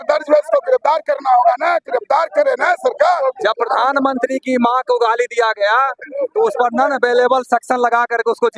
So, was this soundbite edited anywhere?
yes; 1 cut; at 3.2 s

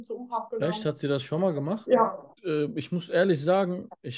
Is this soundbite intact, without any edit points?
no; 1 cut; at 2.3 s

